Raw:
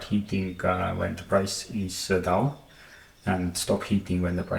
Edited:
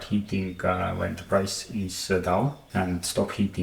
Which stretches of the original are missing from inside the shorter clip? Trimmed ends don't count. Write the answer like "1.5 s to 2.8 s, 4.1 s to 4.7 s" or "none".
2.6 s to 3.1 s